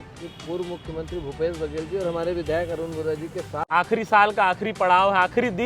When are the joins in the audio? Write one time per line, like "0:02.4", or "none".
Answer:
0:03.6